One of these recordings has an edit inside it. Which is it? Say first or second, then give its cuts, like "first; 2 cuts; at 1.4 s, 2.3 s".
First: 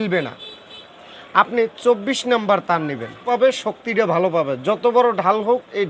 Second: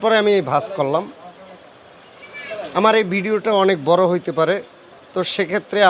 first; 1 cut; at 3.3 s